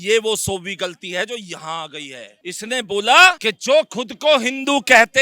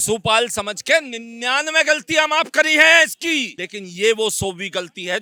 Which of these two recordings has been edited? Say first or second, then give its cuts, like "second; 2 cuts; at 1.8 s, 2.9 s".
first; 1 cut; at 2.4 s